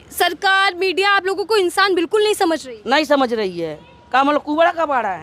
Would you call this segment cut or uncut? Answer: uncut